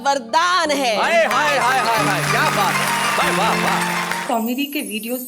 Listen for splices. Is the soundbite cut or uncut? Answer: cut